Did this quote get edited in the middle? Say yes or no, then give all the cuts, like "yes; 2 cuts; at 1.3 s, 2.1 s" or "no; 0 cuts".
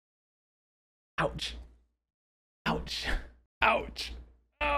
yes; 1 cut; at 3.4 s